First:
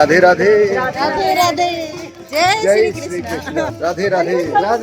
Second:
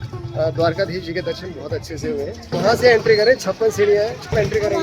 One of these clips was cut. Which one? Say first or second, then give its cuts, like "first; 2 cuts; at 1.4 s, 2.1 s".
second; 1 cut; at 2.4 s